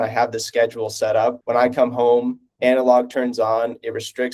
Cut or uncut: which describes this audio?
cut